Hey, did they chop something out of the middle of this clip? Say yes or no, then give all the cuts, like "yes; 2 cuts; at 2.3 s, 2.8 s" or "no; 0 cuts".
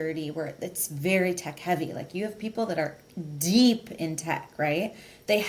no; 0 cuts